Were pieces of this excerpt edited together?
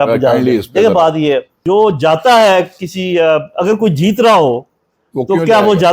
yes; 1 cut; at 1.5 s

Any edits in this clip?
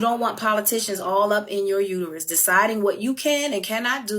yes; 1 cut; at 2.4 s

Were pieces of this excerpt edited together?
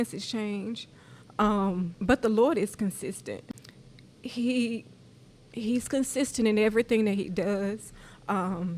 yes; 2 cuts; at 1.9 s, 3.4 s

